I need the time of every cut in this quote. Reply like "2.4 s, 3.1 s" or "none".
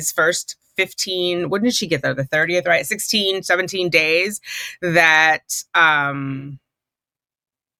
none